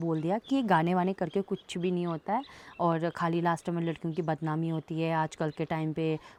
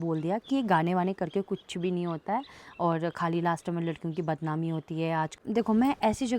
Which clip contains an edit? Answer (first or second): second